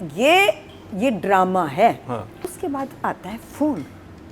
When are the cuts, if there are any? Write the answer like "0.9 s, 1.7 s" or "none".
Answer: 2.5 s

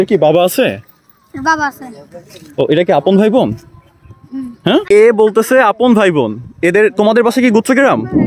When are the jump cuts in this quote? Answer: 4.8 s

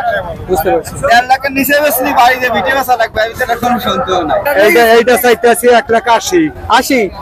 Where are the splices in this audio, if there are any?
4.4 s

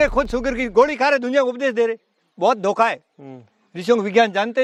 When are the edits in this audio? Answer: none

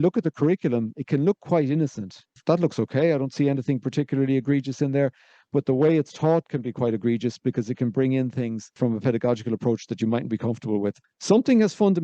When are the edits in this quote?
2.4 s, 8.8 s, 11.0 s

